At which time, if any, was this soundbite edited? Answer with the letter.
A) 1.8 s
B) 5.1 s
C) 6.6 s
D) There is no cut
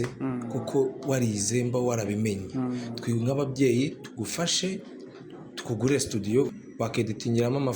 C